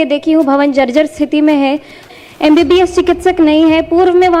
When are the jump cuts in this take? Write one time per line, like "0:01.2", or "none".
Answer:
0:02.0